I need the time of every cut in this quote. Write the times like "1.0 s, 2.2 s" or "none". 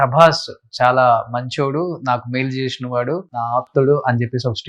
3.4 s

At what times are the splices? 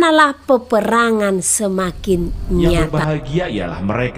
2.8 s

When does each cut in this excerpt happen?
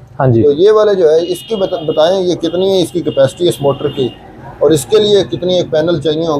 none

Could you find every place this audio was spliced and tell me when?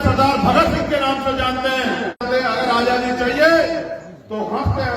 2.2 s

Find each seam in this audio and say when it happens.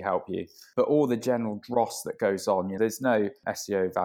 2.8 s

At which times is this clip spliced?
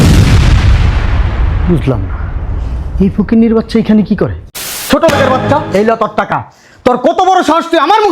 4.9 s

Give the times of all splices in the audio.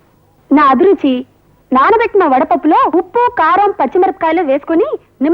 none

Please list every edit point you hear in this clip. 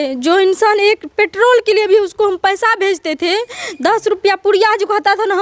none

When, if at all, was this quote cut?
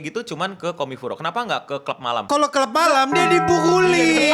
2.2 s

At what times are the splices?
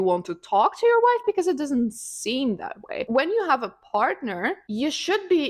none

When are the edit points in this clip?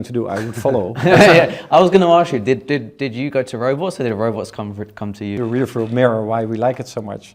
5.4 s

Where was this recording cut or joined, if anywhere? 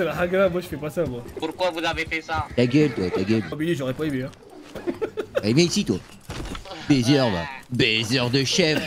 1.2 s, 3.5 s

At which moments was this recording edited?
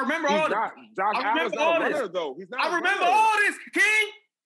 none

